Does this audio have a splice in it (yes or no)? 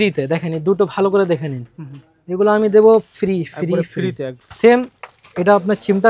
yes